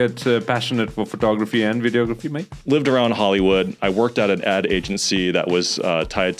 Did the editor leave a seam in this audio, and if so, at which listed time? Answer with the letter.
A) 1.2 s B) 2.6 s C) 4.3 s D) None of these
B